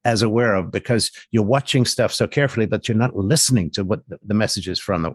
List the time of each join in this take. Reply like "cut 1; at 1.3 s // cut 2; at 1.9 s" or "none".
none